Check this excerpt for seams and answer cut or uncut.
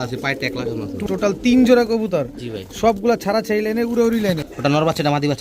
cut